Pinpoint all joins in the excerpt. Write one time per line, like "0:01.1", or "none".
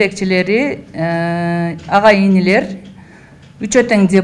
none